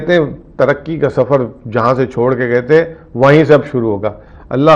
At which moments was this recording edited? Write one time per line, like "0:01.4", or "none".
none